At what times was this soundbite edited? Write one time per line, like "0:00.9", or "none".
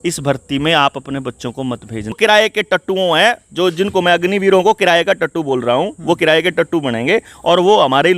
0:02.2